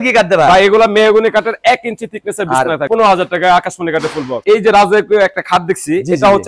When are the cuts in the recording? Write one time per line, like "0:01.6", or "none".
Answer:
0:02.9
0:04.4